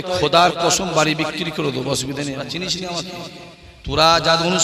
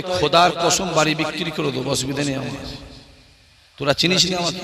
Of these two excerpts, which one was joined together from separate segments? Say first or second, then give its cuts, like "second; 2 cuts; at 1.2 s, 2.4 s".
first; 1 cut; at 2.5 s